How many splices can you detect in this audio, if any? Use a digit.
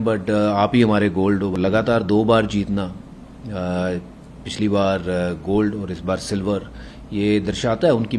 1